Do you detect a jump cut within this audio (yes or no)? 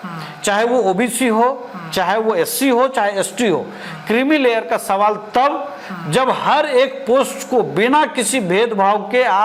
no